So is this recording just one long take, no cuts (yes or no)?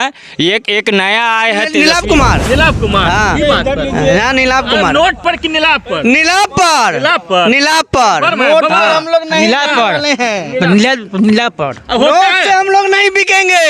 no